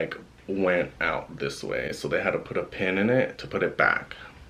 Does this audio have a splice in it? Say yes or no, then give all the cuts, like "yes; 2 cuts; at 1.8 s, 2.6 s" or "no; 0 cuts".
no; 0 cuts